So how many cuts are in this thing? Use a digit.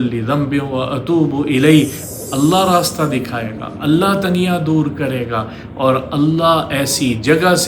1